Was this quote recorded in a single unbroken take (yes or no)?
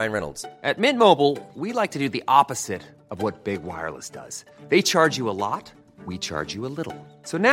yes